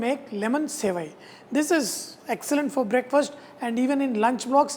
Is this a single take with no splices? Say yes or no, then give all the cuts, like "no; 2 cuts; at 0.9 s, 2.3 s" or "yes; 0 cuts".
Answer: yes; 0 cuts